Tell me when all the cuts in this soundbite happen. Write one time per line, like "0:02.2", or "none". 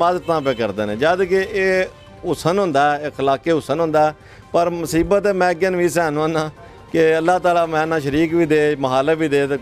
none